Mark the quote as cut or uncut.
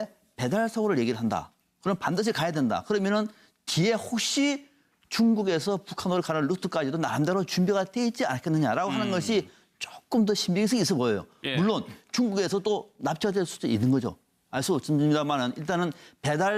uncut